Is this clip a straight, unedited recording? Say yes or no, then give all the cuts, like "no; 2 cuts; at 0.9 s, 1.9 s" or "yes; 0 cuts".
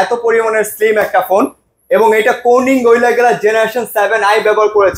yes; 0 cuts